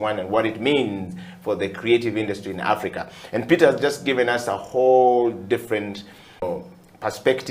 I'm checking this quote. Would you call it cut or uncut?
cut